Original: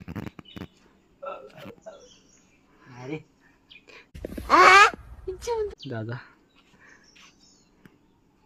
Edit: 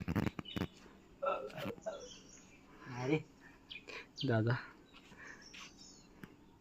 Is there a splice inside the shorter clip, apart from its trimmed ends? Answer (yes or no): yes